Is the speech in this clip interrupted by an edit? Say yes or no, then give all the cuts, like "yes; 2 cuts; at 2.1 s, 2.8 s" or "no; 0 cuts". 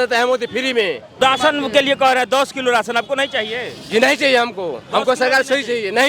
yes; 1 cut; at 1.2 s